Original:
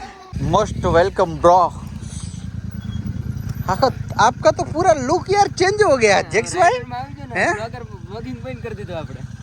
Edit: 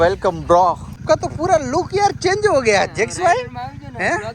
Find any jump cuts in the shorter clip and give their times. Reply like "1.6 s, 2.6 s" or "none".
1.0 s